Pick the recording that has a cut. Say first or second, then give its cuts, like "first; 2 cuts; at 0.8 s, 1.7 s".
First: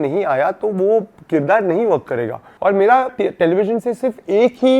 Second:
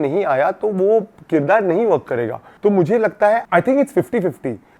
first; 1 cut; at 2.5 s